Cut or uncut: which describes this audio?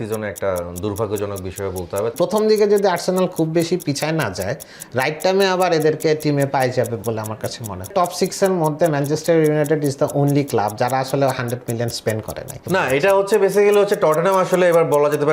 cut